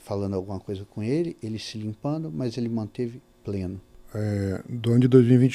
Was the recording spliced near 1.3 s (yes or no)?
no